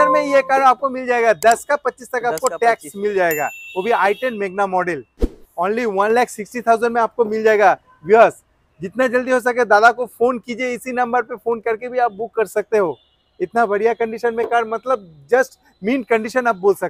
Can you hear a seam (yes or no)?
no